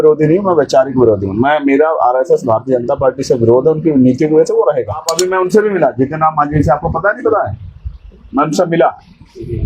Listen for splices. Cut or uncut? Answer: cut